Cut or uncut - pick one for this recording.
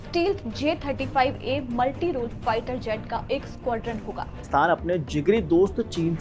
cut